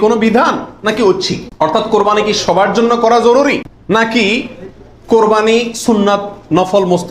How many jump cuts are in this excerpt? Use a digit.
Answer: 2